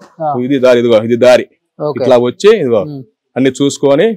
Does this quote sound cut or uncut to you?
uncut